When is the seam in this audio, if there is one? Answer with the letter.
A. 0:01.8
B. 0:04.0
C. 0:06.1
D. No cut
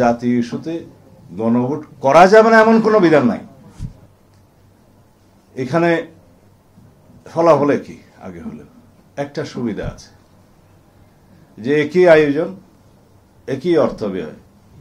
B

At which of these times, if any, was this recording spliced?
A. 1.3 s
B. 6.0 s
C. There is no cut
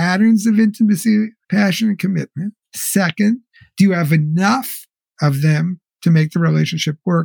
C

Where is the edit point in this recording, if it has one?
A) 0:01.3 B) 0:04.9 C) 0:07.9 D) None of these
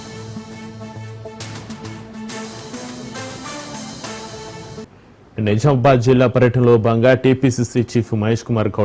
B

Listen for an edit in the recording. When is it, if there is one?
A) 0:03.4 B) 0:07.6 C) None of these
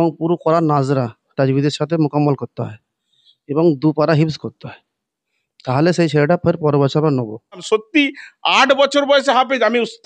B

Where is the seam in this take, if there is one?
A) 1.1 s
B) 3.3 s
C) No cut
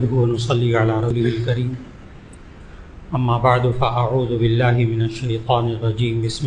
A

